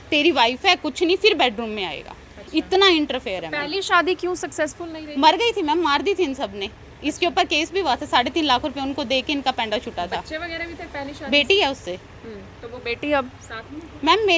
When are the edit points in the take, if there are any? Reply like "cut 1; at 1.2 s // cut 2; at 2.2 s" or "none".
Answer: none